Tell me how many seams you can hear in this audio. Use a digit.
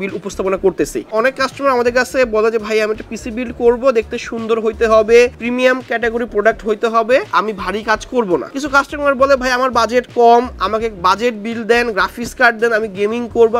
3